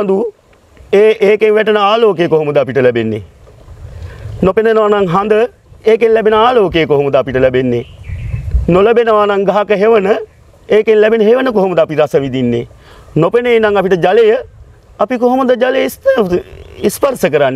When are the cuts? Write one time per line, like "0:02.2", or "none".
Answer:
none